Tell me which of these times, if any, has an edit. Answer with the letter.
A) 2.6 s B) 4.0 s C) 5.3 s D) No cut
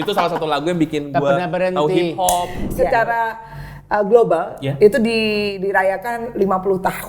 A